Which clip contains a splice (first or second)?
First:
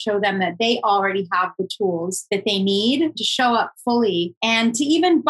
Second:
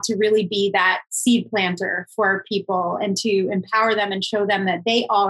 first